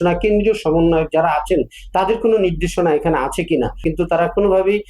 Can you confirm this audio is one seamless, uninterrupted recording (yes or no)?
no